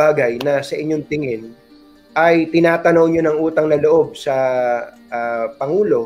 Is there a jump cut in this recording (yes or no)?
no